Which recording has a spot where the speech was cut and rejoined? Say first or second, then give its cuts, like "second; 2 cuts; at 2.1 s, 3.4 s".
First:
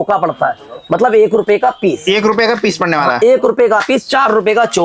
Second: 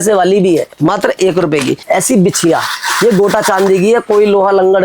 second; 1 cut; at 1.8 s